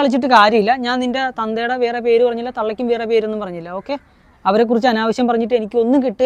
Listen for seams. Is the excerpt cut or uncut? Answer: uncut